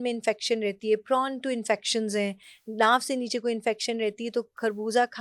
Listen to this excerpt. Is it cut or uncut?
uncut